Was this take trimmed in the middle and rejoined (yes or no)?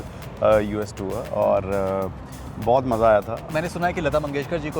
yes